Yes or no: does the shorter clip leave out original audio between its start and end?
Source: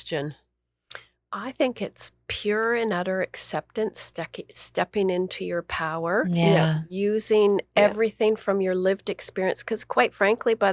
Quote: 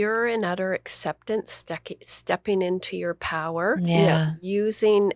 no